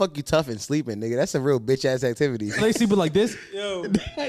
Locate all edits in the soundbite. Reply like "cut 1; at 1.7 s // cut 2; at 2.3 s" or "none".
cut 1; at 2.6 s